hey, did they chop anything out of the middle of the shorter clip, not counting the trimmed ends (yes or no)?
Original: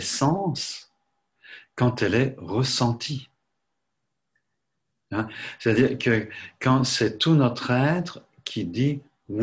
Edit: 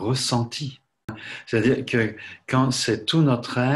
yes